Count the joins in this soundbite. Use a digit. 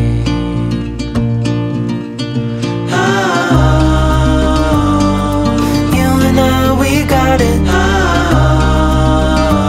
0